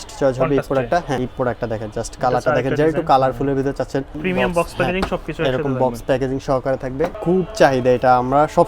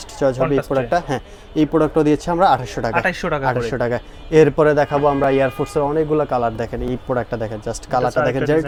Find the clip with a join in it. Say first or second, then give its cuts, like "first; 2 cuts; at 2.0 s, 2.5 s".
first; 3 cuts; at 1.3 s, 4.2 s, 7.2 s